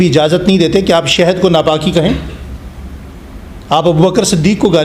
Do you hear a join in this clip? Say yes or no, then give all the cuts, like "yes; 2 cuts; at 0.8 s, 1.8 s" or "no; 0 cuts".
no; 0 cuts